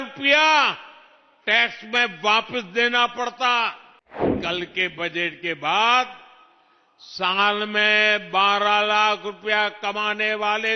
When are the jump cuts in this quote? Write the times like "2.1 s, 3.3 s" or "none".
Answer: 4.3 s